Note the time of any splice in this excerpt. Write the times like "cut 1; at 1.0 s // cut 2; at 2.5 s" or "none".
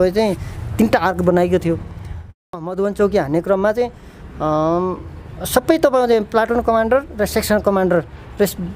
cut 1; at 2.5 s

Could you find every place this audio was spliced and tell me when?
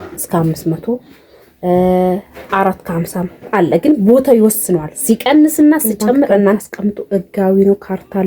cut 1; at 6.6 s

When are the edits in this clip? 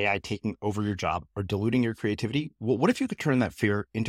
none

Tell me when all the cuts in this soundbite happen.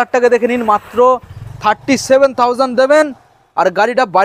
none

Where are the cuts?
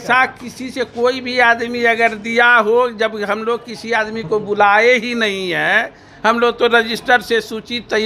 none

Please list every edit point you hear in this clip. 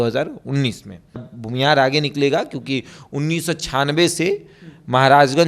cut 1; at 1.4 s

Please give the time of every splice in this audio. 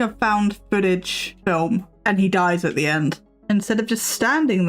cut 1; at 1.6 s // cut 2; at 3.3 s

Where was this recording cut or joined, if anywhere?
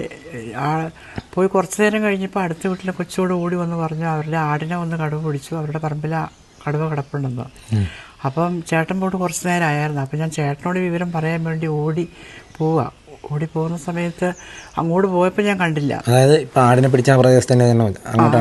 none

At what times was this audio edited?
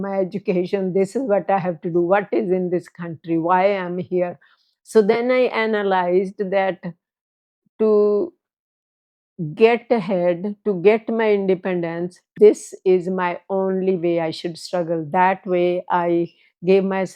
none

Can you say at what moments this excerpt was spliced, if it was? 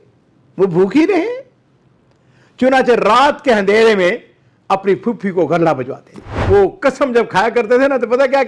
cut 1; at 6.3 s

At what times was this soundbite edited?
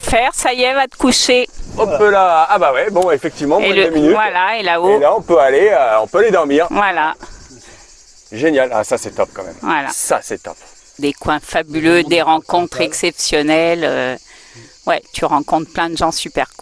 cut 1; at 11.0 s

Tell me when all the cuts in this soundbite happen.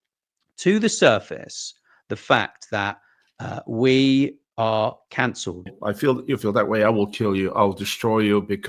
cut 1; at 5.7 s

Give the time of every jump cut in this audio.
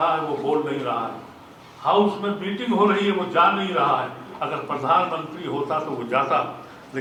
none

